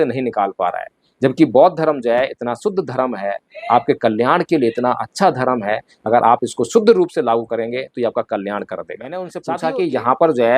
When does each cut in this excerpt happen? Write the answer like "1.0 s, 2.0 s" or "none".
9.4 s